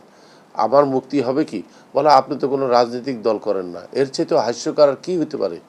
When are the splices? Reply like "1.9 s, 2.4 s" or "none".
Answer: none